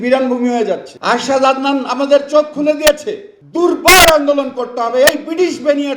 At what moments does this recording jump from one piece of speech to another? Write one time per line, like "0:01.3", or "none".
0:00.9
0:03.4